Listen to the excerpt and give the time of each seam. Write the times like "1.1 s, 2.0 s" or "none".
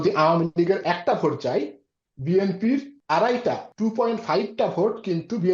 2.9 s, 3.7 s